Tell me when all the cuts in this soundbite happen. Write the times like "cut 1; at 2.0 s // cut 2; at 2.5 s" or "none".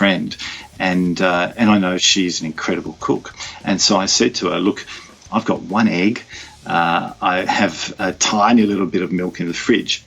cut 1; at 2.0 s